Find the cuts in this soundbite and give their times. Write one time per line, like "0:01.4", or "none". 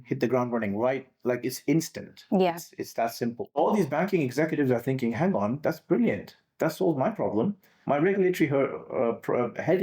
0:03.5